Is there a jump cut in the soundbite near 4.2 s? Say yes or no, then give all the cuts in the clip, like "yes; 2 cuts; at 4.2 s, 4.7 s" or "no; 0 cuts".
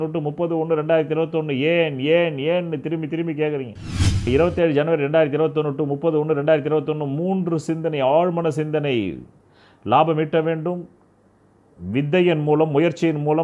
yes; 1 cut; at 4.2 s